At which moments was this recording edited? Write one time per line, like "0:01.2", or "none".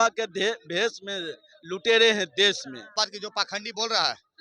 0:03.1